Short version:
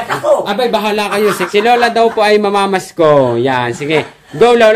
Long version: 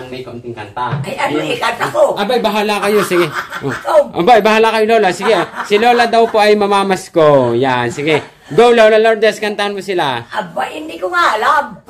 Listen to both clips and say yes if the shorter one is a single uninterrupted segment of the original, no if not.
no